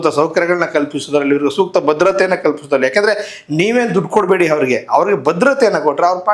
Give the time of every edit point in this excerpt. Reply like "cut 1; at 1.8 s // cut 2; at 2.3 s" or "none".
none